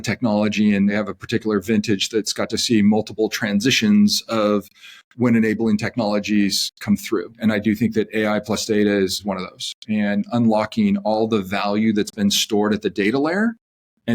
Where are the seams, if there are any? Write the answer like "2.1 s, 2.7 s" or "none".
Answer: 0.9 s, 7.3 s, 9.2 s